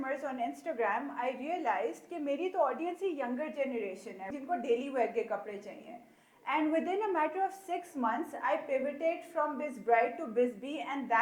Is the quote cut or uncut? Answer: cut